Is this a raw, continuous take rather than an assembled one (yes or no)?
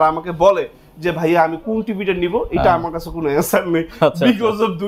yes